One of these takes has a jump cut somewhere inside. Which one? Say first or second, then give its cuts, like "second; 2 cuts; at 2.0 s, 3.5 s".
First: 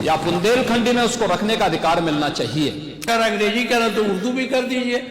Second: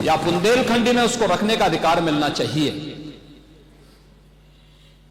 first; 1 cut; at 3.1 s